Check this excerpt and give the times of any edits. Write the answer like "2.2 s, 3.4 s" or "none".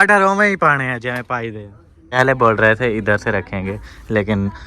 2.2 s